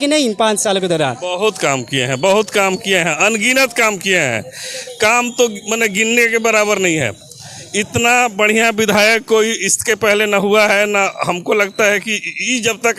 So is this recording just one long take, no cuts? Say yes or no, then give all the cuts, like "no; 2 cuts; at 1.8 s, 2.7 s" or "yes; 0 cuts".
yes; 0 cuts